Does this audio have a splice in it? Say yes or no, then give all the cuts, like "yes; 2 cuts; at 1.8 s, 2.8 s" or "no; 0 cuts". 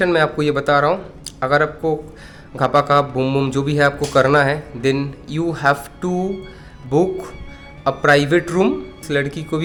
no; 0 cuts